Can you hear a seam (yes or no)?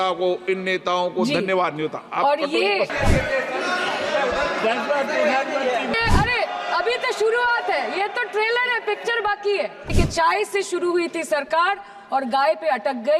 yes